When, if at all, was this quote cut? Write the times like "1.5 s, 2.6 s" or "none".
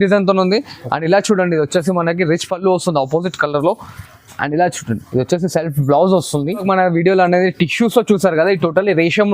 6.6 s